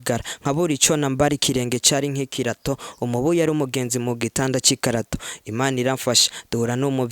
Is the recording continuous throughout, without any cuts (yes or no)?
yes